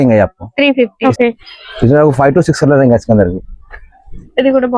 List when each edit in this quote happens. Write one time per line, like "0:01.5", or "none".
0:01.0

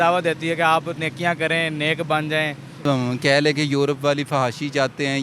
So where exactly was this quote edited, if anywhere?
0:02.9

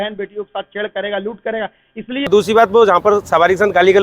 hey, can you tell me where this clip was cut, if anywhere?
0:02.3

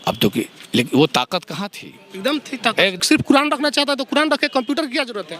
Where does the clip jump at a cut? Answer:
0:03.0

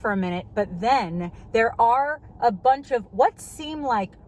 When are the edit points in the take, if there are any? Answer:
none

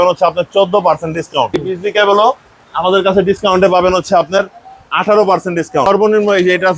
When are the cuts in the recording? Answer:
0:01.7
0:05.9

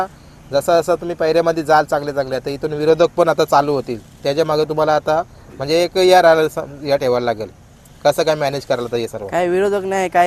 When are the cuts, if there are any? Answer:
none

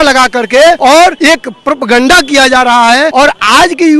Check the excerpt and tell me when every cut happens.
0:01.0
0:03.1

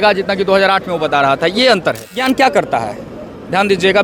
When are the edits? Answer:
0:02.2

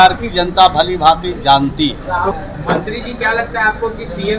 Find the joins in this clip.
0:02.3

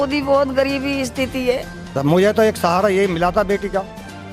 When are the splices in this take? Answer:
0:01.9

